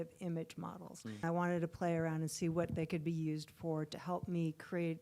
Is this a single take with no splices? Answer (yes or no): no